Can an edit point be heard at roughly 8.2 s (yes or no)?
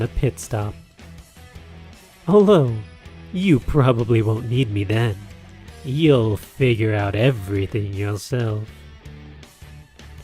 yes